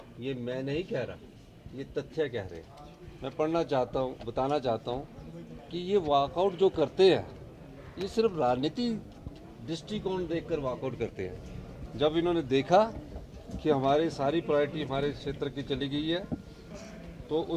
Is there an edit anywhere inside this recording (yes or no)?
no